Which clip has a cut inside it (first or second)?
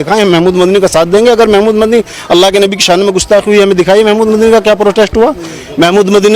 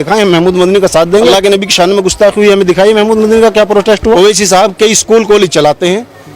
second